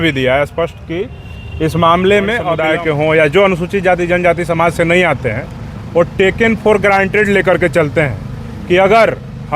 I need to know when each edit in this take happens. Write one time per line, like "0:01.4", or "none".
0:02.5